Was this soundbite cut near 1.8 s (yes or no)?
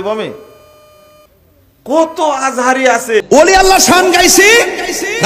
no